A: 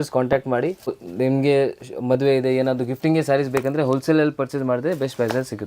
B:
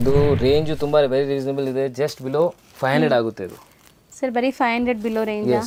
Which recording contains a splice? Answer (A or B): A